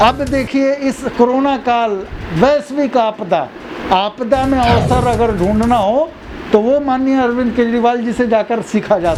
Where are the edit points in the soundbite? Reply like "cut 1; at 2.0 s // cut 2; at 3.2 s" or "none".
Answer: none